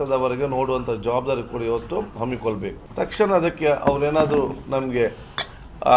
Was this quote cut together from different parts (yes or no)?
yes